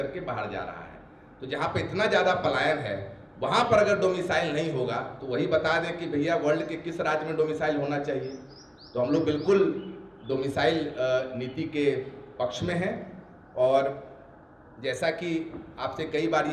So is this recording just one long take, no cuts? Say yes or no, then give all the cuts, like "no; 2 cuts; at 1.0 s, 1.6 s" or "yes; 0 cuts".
yes; 0 cuts